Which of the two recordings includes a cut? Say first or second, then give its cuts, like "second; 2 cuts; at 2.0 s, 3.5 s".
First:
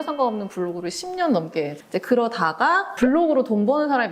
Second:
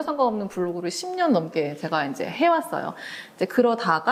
first; 2 cuts; at 1.8 s, 2.9 s